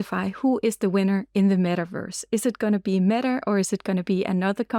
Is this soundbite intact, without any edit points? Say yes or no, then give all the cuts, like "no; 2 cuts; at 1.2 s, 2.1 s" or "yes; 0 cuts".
yes; 0 cuts